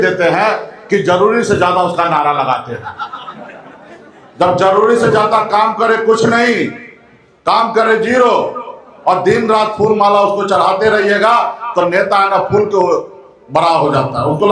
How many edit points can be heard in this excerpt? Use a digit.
0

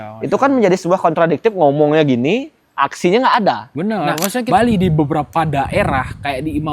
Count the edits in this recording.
1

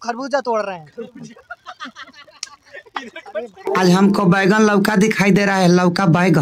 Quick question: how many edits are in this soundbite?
2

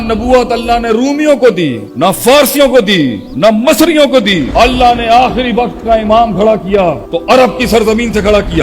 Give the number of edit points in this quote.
4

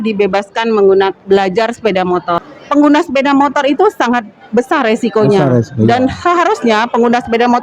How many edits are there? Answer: 1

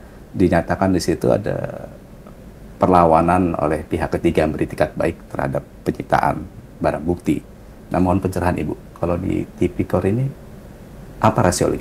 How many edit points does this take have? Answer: 0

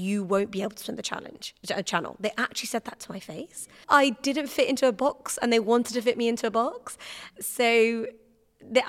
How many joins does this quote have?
2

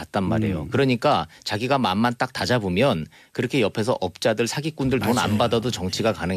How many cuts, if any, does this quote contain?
1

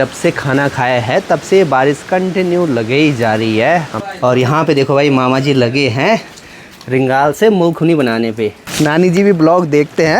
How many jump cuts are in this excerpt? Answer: 2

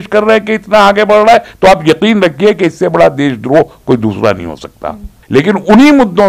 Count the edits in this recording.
1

